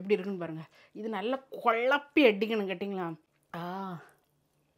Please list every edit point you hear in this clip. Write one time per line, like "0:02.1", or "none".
0:03.3